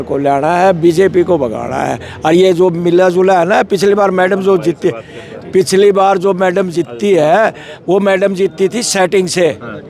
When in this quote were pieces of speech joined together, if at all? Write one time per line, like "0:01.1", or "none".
none